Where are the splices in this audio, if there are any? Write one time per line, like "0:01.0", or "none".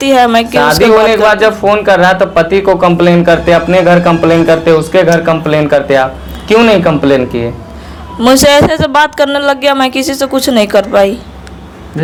none